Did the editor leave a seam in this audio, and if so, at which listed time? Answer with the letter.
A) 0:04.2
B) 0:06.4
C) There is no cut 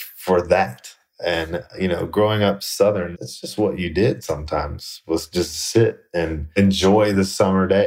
B